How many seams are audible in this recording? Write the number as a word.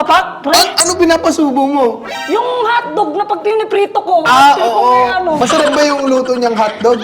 one